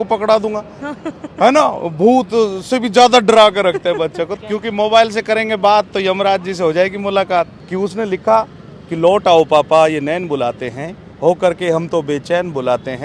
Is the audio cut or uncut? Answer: cut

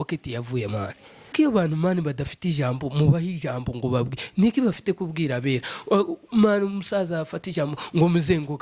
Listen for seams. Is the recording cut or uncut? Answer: cut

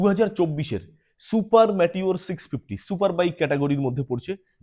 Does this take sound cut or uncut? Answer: uncut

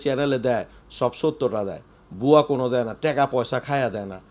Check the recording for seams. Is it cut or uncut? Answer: uncut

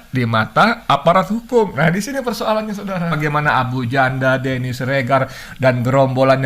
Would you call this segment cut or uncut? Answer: cut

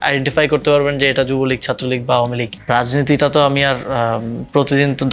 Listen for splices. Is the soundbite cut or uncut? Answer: cut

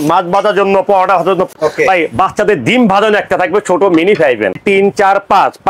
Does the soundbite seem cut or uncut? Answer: cut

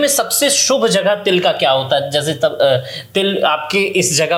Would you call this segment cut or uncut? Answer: uncut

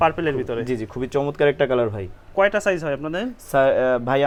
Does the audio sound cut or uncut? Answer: uncut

